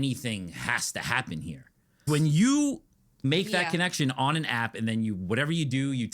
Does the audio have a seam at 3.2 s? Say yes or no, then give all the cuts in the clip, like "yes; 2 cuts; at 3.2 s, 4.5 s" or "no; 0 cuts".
yes; 2 cuts; at 2.1 s, 3.2 s